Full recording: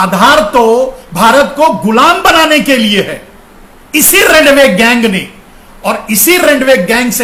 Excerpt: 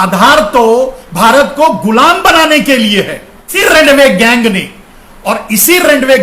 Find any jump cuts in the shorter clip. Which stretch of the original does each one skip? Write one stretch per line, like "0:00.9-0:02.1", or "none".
0:03.5-0:04.1